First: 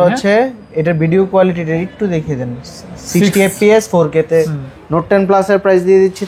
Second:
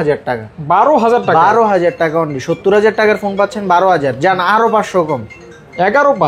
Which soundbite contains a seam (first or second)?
first